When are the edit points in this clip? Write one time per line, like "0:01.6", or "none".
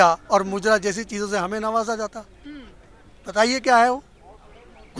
none